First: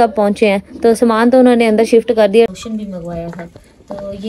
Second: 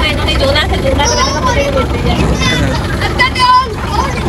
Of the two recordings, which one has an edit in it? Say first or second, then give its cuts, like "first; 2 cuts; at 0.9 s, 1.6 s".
first; 1 cut; at 2.5 s